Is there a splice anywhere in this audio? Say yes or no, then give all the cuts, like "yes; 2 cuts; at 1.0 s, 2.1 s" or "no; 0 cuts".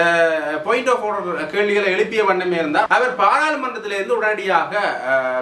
yes; 1 cut; at 2.9 s